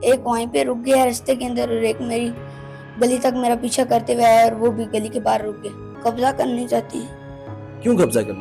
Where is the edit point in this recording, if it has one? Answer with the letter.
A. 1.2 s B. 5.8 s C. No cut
B